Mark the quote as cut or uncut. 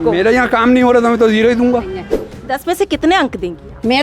cut